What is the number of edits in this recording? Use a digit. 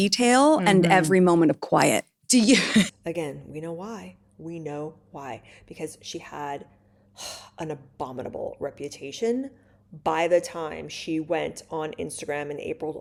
0